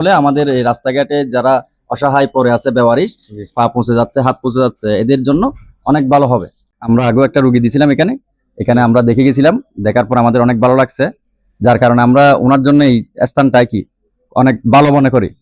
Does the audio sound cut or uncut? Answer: cut